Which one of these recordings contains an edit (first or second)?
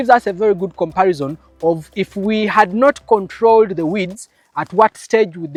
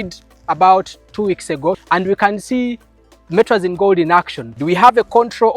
second